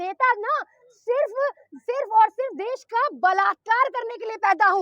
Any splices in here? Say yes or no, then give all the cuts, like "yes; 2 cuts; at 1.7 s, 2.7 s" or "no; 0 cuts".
no; 0 cuts